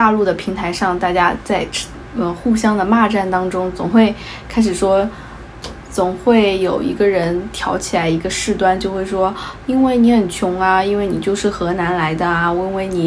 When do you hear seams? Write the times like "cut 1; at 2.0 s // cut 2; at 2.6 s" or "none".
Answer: none